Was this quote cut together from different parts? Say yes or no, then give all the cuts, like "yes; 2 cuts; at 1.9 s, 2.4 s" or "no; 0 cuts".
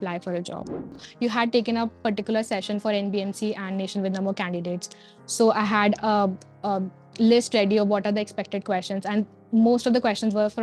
yes; 1 cut; at 1.1 s